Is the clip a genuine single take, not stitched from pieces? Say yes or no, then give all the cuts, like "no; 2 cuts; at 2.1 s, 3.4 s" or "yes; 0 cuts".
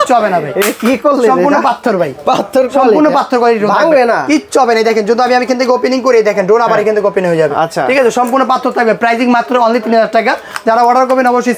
yes; 0 cuts